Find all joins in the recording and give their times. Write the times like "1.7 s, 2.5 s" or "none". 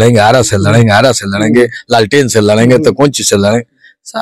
none